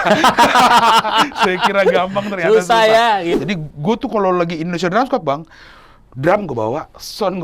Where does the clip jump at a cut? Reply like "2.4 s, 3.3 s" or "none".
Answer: 3.3 s